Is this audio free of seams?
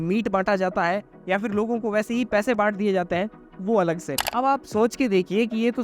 no; 1 cut; at 4.2 s

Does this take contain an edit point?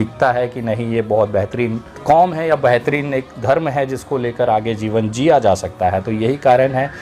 no; 0 cuts

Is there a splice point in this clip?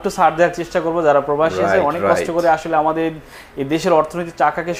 no; 0 cuts

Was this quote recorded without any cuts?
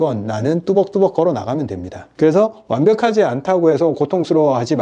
yes; 0 cuts

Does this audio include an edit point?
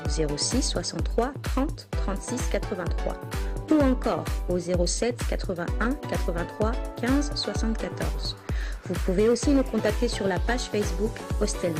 no; 0 cuts

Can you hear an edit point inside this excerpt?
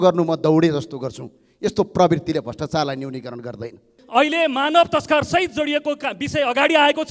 yes; 1 cut; at 3.9 s

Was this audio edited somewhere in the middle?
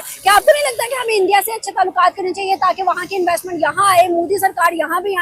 no; 0 cuts

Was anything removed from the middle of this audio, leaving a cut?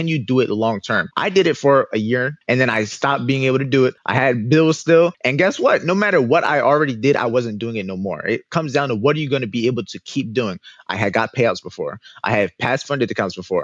yes; 4 cuts; at 1.1 s, 2.4 s, 4.0 s, 5.2 s

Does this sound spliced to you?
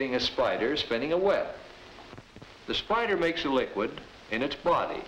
no; 0 cuts

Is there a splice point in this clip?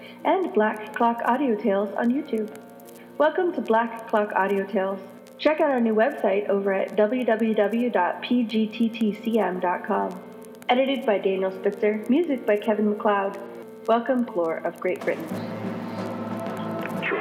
no; 0 cuts

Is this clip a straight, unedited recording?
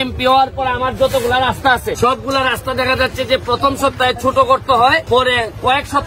no; 2 cuts; at 2.0 s, 5.0 s

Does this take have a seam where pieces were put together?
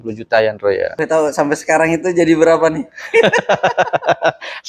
yes; 1 cut; at 0.9 s

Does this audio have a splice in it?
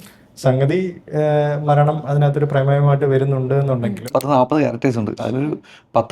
yes; 1 cut; at 4.1 s

